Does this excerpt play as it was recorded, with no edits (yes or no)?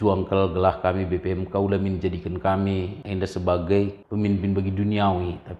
no